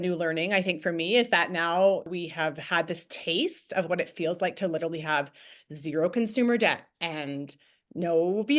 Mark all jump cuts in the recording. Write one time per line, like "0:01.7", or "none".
0:02.1